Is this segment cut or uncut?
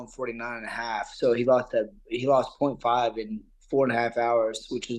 uncut